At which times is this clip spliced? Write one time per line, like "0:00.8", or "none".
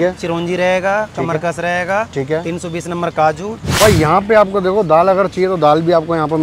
0:03.6